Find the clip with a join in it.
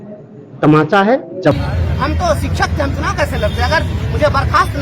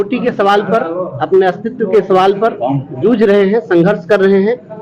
first; 1 cut; at 1.5 s

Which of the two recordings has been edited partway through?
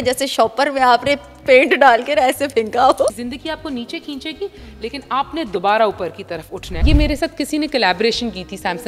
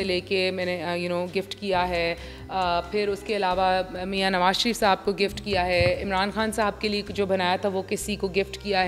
first; 2 cuts; at 3.1 s, 6.8 s

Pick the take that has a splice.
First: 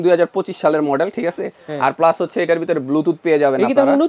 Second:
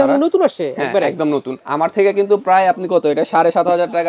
second; 1 cut; at 1.6 s

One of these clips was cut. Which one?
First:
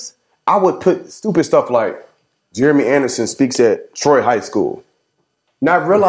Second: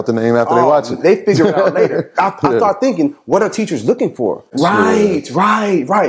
second; 1 cut; at 4.5 s

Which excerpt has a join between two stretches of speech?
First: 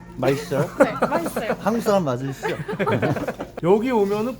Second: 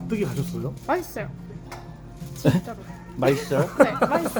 first; 1 cut; at 3.5 s

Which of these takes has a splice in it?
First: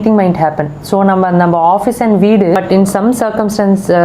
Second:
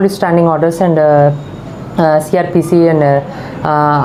first; 1 cut; at 2.6 s

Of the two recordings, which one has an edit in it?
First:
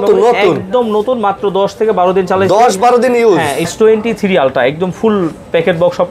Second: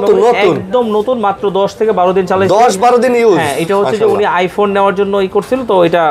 first; 1 cut; at 3.7 s

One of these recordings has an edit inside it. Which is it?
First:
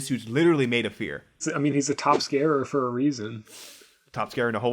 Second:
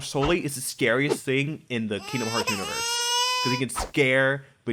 first; 1 cut; at 1.4 s

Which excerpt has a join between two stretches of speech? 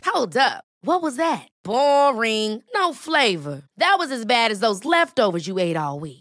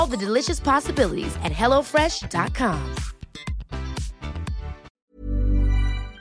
second; 1 cut; at 4.9 s

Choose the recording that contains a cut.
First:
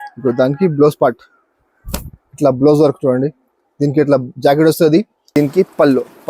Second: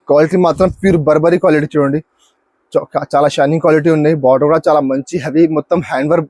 first; 1 cut; at 5.2 s

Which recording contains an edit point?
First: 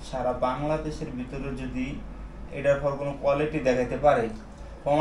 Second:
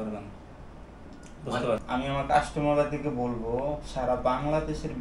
second; 1 cut; at 1.8 s

